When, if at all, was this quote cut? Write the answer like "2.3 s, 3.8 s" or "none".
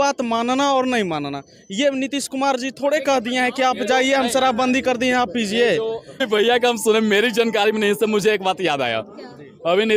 6.2 s